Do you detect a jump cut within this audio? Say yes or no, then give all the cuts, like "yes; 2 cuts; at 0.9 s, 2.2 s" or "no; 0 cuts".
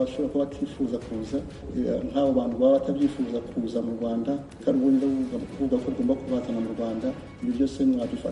yes; 2 cuts; at 4.5 s, 7.3 s